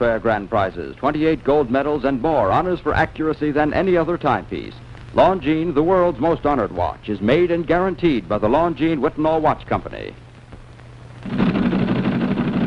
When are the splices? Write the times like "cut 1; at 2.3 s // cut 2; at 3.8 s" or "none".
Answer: cut 1; at 2.8 s